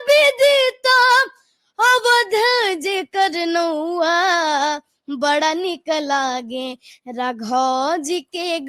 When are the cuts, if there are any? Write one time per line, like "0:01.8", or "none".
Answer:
none

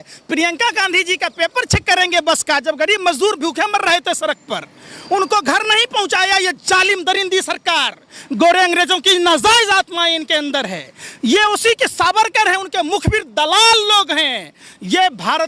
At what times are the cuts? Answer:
none

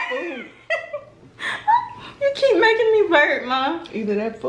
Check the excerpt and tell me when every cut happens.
none

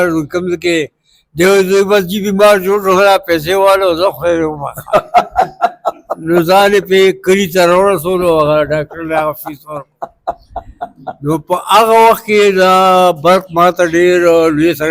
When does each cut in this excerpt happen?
none

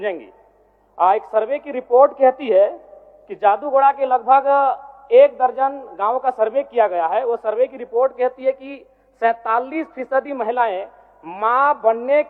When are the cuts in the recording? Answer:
none

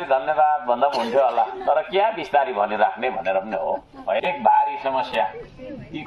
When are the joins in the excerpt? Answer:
0:04.2

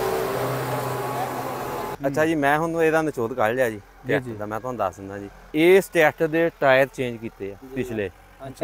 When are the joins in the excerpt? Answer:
0:01.9
0:05.3
0:07.6

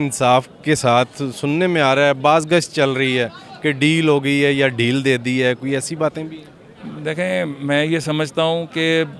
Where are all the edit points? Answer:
none

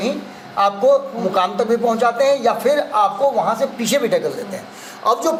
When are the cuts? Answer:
none

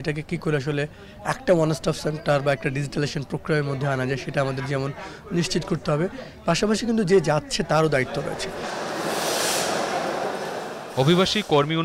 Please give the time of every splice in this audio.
none

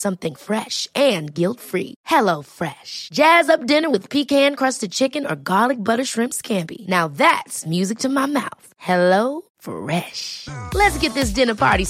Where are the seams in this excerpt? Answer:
none

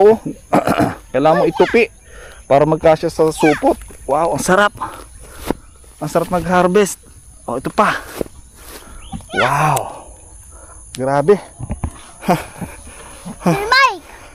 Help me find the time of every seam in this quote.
none

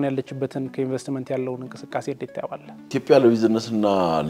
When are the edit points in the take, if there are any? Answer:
0:02.9

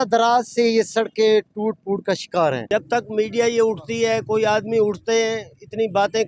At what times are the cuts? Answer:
0:02.6

